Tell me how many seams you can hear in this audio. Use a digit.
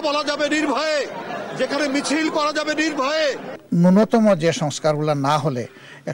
1